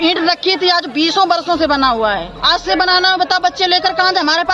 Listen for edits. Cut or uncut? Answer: cut